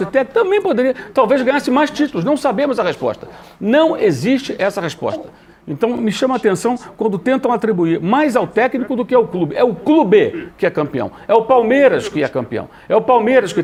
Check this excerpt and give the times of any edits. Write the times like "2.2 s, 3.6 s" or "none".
none